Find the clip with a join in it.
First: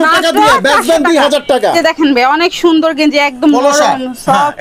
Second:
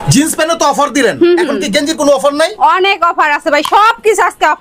first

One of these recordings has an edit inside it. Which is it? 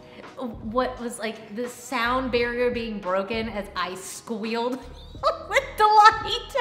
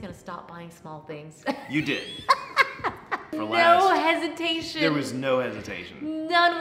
second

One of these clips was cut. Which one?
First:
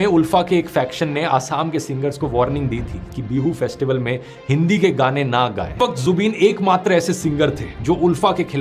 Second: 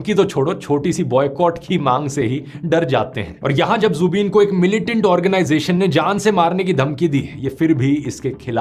first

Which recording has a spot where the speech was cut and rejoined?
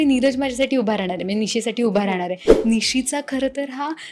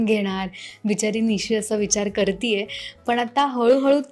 first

